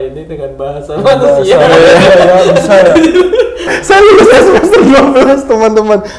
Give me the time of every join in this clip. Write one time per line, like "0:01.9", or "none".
0:03.7